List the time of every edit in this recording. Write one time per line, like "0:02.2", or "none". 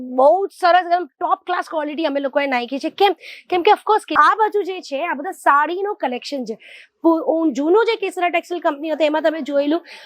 0:04.1